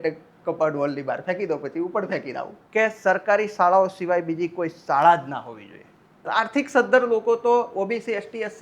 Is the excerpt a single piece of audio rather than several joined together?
no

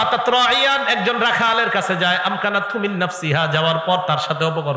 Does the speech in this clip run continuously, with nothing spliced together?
yes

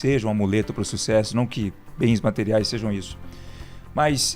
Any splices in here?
yes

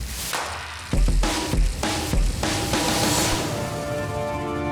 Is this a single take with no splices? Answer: yes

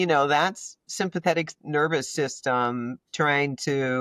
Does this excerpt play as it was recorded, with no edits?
yes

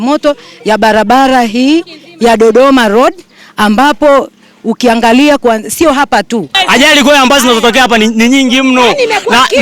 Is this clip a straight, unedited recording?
no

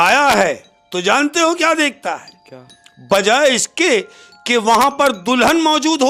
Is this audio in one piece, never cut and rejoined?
yes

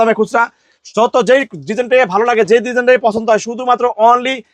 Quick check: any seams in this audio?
no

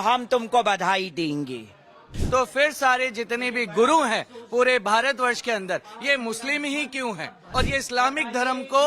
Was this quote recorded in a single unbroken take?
no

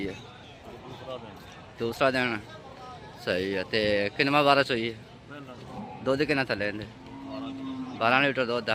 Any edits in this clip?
no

